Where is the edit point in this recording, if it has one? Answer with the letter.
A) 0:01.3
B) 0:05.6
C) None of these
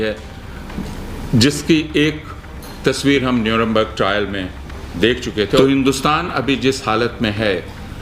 B